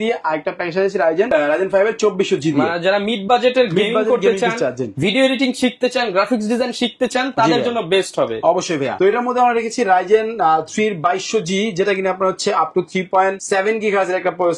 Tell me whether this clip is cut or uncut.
uncut